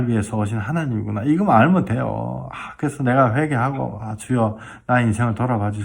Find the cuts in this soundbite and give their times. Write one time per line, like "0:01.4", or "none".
none

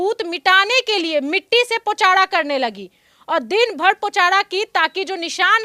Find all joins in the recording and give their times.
none

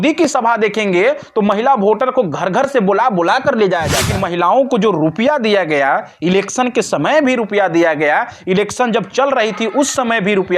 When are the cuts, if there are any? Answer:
0:04.0

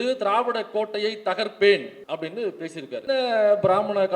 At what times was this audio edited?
0:02.0
0:03.0

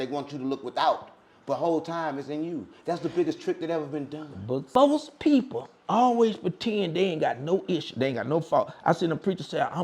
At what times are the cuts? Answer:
0:04.7

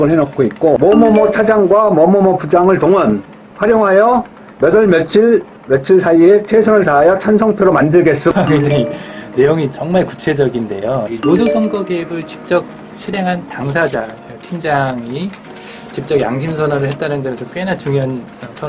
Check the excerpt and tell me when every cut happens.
0:00.8
0:08.3
0:11.1

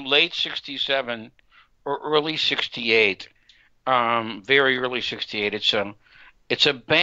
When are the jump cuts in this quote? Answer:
none

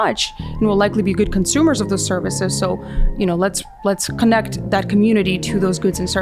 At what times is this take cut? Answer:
none

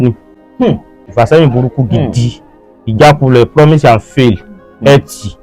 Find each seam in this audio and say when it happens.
0:01.0

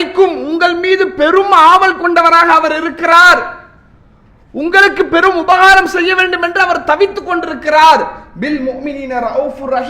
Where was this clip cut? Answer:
none

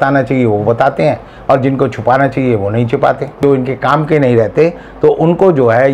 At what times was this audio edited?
0:03.4

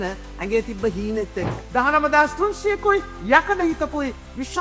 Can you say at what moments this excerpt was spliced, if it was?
0:01.6

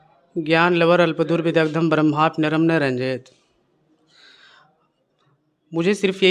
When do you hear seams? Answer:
none

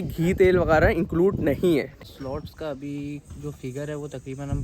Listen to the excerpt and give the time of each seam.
0:01.9

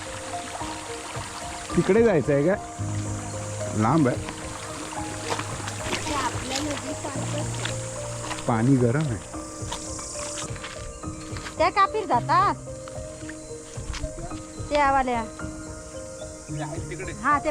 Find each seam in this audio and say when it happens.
0:10.5

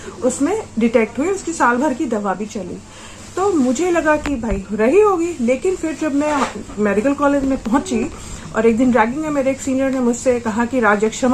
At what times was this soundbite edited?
none

